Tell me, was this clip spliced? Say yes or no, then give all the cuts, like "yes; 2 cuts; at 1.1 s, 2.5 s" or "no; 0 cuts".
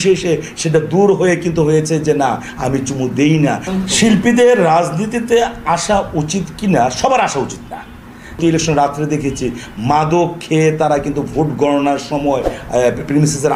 yes; 2 cuts; at 3.6 s, 8.4 s